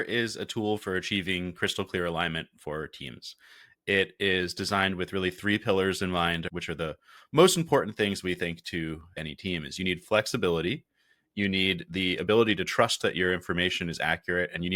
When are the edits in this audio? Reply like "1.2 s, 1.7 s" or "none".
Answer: 6.5 s, 9.2 s